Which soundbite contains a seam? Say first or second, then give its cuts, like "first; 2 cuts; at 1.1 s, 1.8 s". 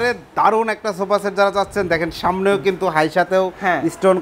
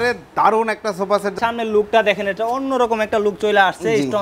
second; 1 cut; at 1.4 s